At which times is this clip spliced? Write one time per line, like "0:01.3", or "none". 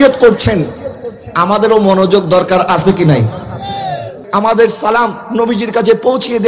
0:04.2